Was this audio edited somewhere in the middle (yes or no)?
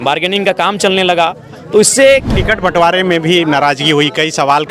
yes